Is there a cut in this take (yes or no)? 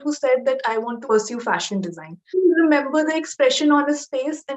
yes